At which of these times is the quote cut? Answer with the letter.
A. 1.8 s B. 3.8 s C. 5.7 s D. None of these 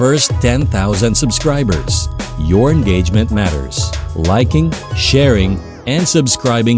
D